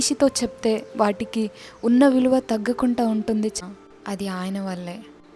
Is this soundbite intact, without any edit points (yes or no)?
no